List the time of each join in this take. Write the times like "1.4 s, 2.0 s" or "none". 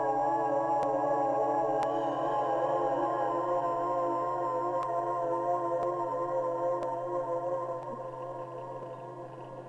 none